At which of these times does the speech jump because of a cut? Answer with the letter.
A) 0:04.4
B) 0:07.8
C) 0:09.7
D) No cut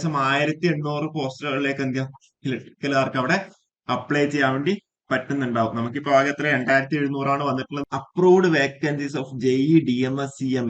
B